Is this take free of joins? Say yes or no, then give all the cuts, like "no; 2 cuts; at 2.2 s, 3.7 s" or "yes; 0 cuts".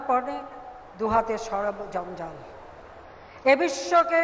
yes; 0 cuts